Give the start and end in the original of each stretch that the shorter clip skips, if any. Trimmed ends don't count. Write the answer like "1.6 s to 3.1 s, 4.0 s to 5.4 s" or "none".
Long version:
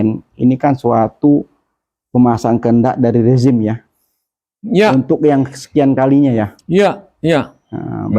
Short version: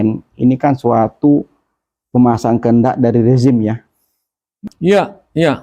4.6 s to 6.5 s